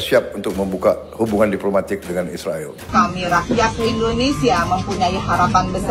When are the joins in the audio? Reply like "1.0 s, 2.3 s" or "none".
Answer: 2.9 s

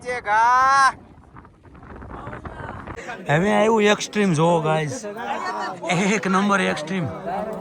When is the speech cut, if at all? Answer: 3.1 s

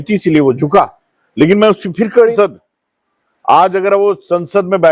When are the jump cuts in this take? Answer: 2.3 s

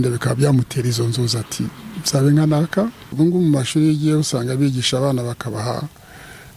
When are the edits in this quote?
3.0 s

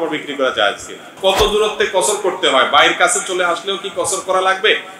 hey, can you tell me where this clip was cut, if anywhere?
1.2 s

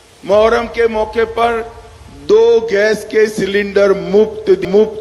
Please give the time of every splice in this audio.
none

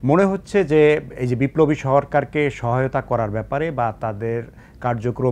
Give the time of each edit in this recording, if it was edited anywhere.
none

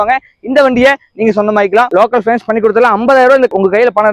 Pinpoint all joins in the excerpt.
1.9 s

